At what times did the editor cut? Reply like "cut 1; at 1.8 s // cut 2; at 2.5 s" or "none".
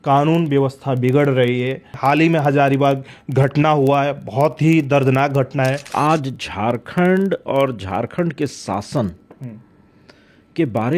cut 1; at 1.9 s // cut 2; at 5.9 s